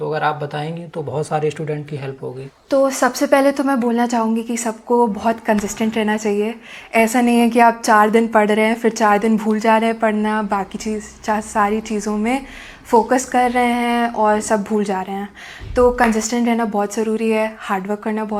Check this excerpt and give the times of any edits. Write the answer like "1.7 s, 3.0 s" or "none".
none

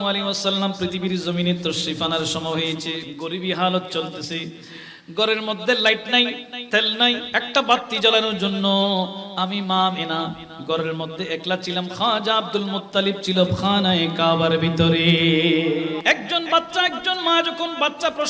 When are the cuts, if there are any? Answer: 3.1 s, 7.2 s, 16.0 s

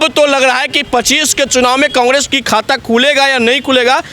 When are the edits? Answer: none

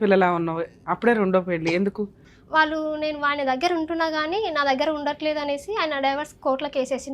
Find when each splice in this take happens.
2.2 s

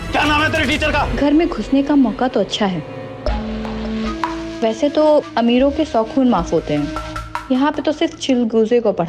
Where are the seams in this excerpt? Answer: 1.1 s

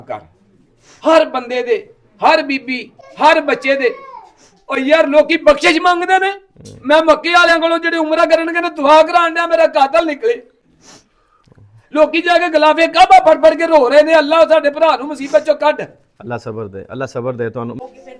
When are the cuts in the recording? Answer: none

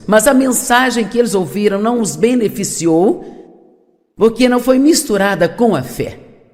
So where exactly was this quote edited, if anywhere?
5.4 s

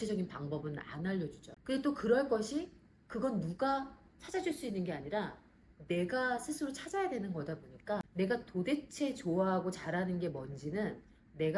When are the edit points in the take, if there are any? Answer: 1.5 s, 8.0 s

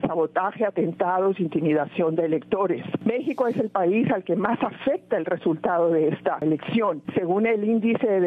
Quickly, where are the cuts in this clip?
2.9 s, 6.6 s

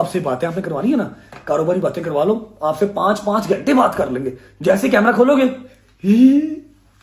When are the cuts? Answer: none

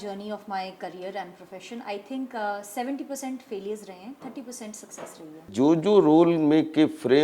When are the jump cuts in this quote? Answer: 5.5 s

